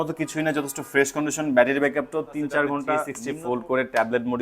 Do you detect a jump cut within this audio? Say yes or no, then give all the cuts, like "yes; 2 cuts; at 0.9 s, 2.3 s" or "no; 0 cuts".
yes; 1 cut; at 3.2 s